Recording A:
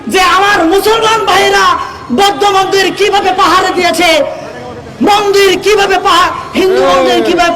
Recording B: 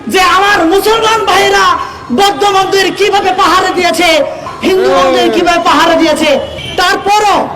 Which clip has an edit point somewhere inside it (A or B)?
B